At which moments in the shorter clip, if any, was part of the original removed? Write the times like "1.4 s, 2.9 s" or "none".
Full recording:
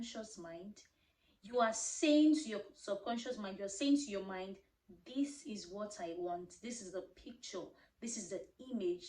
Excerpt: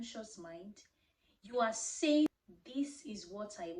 2.3 s